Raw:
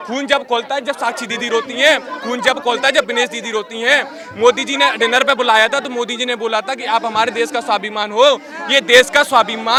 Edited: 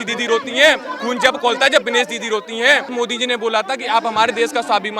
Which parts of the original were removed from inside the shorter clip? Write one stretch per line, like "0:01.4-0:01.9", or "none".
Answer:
0:04.1-0:05.9